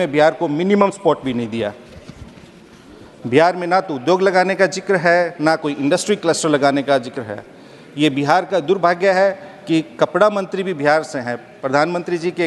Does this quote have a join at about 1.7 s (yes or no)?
no